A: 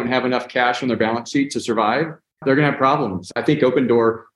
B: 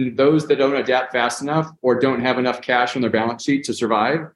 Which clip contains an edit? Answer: A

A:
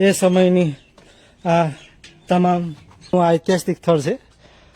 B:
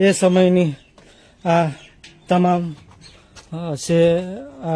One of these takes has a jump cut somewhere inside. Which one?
A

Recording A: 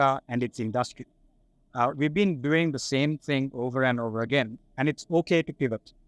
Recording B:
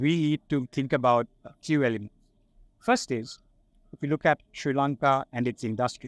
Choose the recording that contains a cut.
A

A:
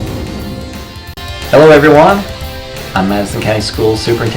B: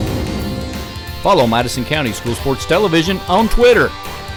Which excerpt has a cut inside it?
A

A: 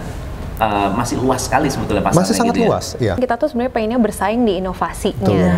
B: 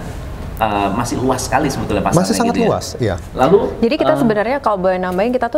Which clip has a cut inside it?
A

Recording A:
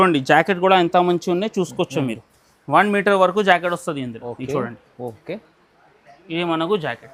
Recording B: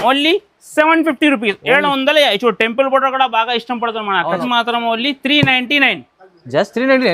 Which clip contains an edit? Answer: B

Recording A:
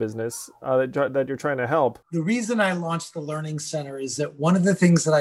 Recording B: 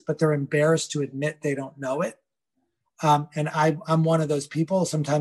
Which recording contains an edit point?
A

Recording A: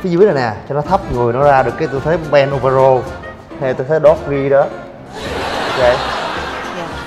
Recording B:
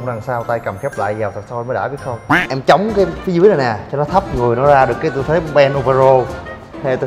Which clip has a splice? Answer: B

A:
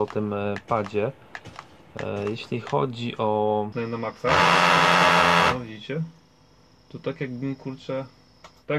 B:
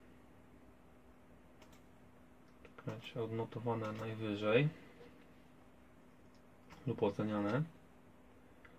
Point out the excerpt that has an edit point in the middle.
A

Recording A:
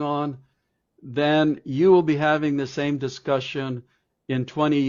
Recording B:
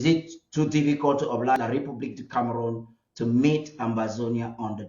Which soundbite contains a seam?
B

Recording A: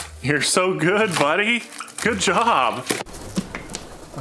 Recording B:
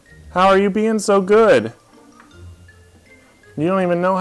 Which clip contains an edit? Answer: A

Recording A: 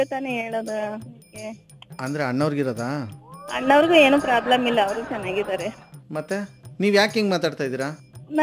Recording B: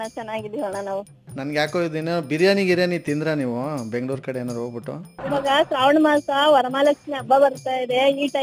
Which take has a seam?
B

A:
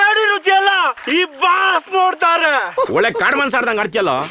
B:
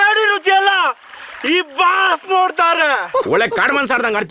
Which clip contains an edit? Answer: A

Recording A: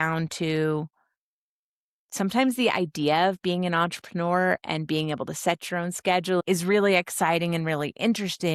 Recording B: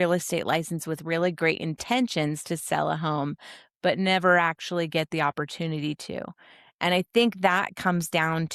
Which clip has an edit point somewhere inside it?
A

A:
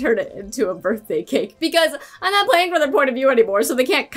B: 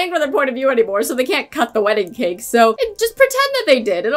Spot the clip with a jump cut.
B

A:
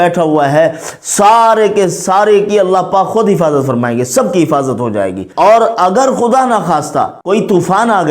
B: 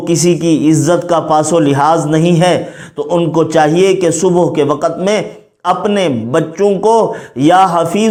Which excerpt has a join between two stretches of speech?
A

